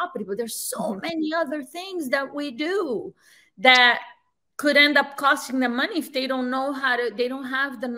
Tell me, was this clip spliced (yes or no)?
no